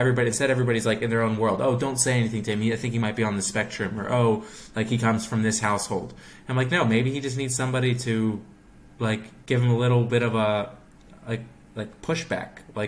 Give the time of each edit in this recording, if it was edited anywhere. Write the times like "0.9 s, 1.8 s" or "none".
none